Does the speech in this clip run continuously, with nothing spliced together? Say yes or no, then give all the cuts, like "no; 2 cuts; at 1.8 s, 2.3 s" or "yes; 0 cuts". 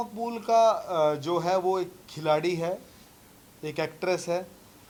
yes; 0 cuts